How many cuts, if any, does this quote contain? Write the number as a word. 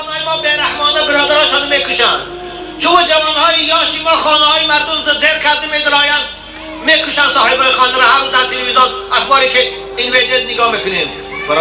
zero